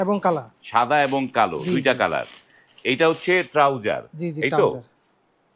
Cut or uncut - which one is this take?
uncut